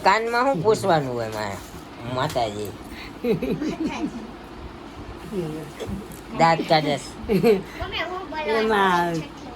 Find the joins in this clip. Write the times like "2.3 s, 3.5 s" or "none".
none

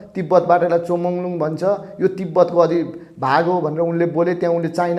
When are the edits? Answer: none

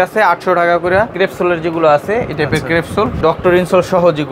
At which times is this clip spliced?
1.1 s, 3.2 s

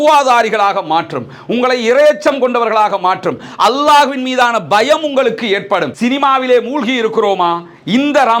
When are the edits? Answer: 5.9 s

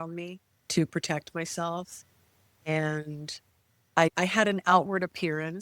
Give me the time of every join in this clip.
4.1 s

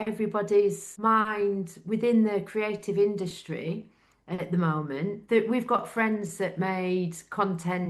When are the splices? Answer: 0.9 s, 5.2 s

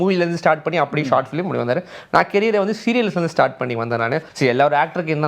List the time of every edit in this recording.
4.3 s

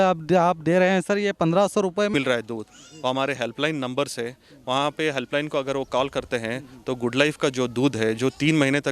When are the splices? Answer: 2.1 s

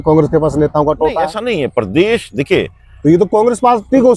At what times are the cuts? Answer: none

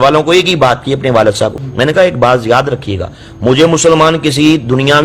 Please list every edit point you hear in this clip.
1.6 s

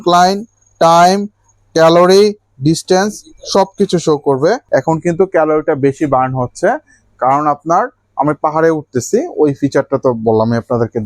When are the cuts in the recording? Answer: 4.6 s

